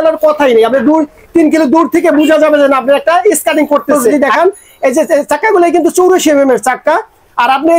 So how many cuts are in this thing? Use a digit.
1